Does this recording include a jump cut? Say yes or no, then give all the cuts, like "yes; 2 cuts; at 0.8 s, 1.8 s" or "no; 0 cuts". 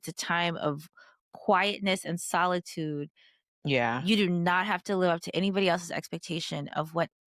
no; 0 cuts